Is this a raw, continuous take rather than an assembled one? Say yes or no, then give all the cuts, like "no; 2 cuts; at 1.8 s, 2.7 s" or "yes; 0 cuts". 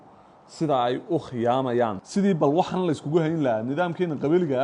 no; 1 cut; at 2.0 s